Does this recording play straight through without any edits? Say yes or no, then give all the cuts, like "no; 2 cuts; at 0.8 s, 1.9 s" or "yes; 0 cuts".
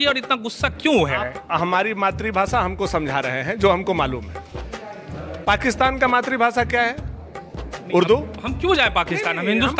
yes; 0 cuts